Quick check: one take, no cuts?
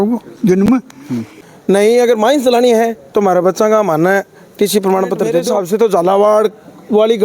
no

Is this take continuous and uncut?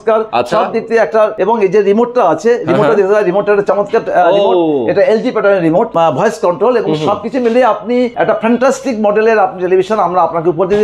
no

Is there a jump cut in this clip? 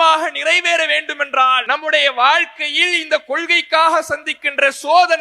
yes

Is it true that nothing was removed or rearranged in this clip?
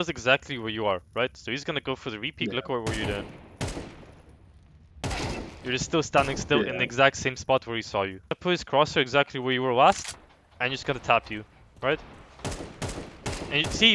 no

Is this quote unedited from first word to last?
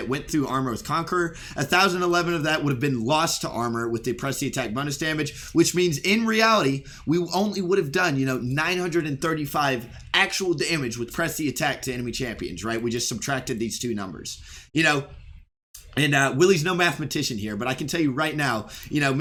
yes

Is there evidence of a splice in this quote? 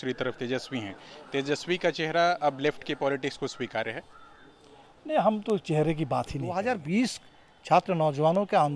yes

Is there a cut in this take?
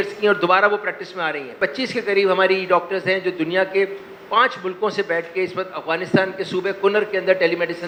no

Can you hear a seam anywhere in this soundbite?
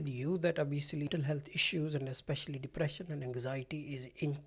yes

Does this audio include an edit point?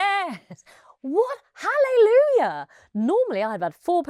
no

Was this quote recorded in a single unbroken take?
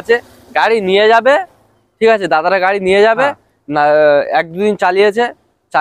yes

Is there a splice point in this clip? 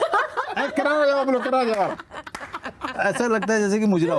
no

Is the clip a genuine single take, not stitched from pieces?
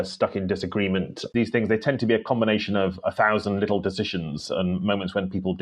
no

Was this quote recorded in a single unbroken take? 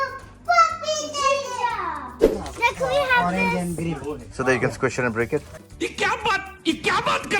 no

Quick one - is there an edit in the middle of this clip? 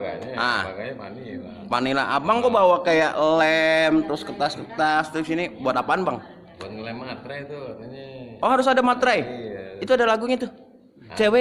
no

